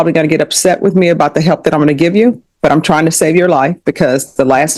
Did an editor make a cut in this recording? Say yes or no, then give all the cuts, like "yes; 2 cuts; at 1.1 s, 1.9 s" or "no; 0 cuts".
no; 0 cuts